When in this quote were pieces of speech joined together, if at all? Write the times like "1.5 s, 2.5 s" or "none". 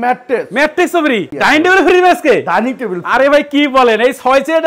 1.3 s